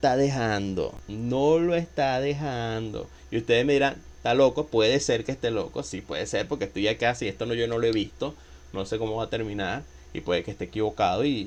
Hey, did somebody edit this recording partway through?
no; 0 cuts

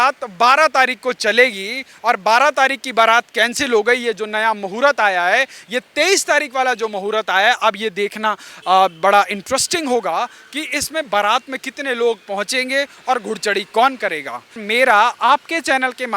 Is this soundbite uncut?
no; 1 cut; at 14.6 s

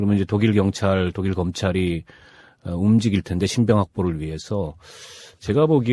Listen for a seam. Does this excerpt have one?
yes; 1 cut; at 1.5 s

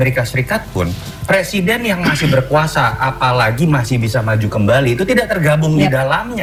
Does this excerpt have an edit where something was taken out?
no; 0 cuts

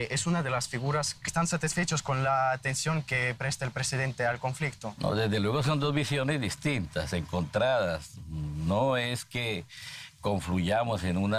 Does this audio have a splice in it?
no; 0 cuts

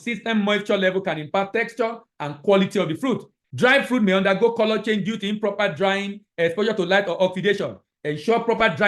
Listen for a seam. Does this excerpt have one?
yes; 1 cut; at 3.4 s

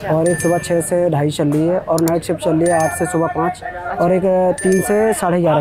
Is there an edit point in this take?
no; 0 cuts

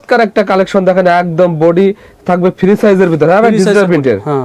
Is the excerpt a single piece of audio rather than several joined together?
yes; 0 cuts

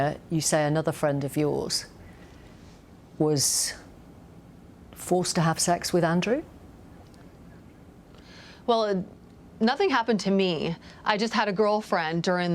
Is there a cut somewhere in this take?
no; 0 cuts

